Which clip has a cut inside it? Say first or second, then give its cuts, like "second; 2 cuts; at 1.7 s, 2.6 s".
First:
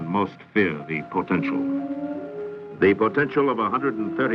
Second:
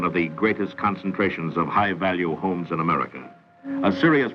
second; 1 cut; at 2.1 s